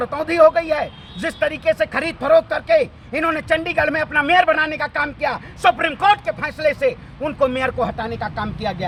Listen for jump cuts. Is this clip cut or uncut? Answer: uncut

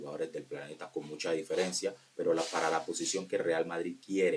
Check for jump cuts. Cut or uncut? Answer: uncut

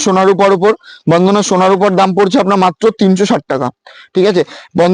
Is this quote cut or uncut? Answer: uncut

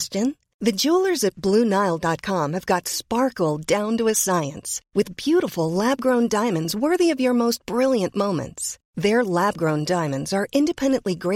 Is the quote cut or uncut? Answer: uncut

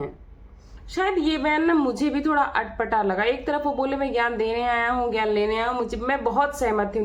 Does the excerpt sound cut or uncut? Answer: uncut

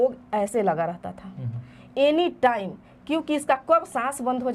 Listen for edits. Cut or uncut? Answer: uncut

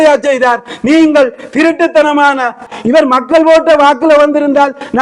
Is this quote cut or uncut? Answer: cut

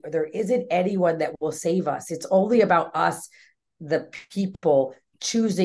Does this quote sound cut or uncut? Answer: uncut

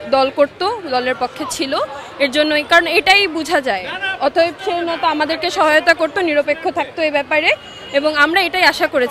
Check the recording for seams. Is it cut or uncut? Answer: uncut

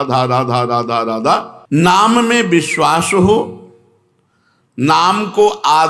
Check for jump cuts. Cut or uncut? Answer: cut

